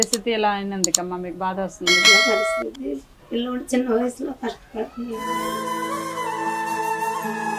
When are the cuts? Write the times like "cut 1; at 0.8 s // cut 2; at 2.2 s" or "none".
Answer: none